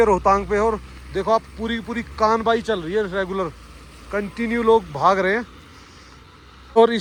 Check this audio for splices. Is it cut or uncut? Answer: uncut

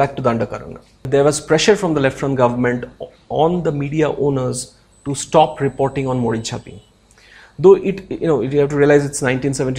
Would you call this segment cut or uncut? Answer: cut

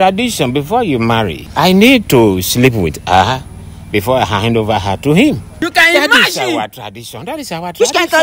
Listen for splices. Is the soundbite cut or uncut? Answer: cut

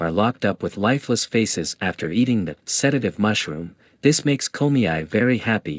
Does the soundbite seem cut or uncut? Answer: uncut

